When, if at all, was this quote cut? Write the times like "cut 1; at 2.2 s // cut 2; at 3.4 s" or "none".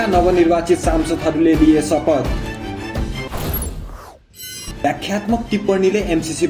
none